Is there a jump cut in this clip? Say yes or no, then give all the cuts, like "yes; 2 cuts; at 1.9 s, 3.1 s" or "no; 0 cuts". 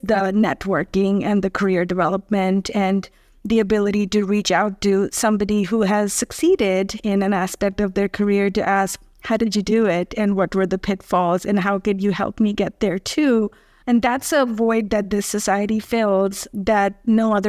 no; 0 cuts